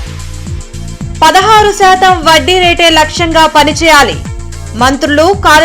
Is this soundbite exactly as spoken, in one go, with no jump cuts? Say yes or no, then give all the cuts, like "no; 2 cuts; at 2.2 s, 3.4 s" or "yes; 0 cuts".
no; 1 cut; at 0.9 s